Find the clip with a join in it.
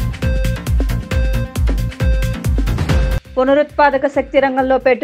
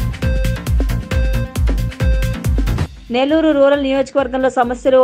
first; 1 cut; at 2.8 s

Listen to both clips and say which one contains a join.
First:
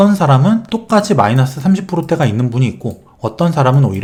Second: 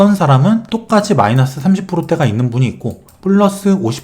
second; 1 cut; at 3.1 s

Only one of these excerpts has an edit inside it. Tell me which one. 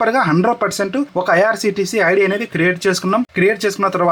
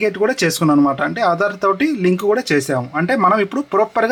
first; 2 cuts; at 1.1 s, 3.3 s

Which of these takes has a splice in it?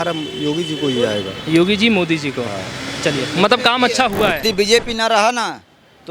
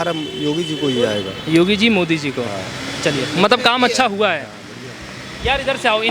first; 1 cut; at 4.4 s

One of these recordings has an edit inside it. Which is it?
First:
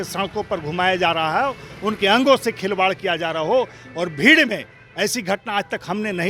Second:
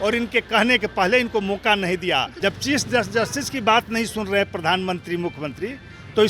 second; 1 cut; at 2.3 s

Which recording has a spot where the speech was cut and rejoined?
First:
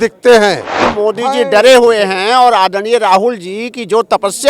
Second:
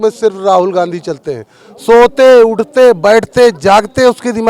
first; 1 cut; at 0.9 s

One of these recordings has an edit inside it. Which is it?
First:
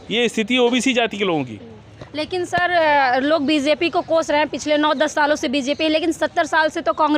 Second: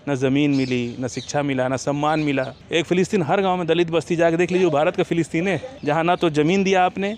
second; 2 cuts; at 2.6 s, 5.7 s

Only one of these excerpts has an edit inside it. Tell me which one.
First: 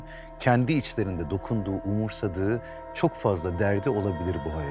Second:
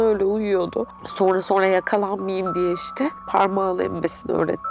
second; 2 cuts; at 1.0 s, 3.2 s

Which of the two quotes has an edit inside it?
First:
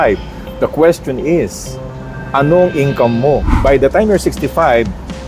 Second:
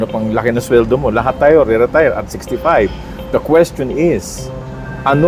first; 1 cut; at 3.5 s

